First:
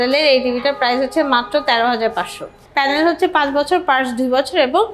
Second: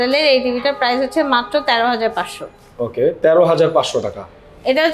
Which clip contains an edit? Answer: first; 1 cut; at 2.6 s

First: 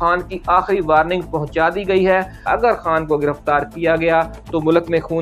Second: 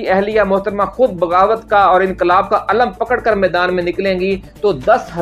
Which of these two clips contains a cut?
first; 1 cut; at 2.5 s

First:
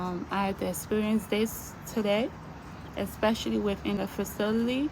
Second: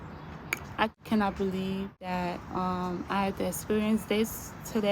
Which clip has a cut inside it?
first; 1 cut; at 4.0 s

